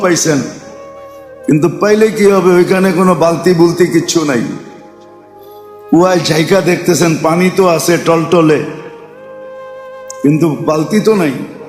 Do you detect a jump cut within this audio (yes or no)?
yes